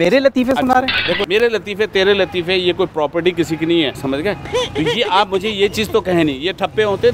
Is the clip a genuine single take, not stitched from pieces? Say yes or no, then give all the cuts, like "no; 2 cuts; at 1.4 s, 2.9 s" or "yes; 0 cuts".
no; 2 cuts; at 1.2 s, 4.0 s